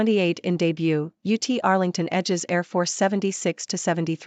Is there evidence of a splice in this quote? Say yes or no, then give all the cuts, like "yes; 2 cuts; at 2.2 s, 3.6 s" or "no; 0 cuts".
no; 0 cuts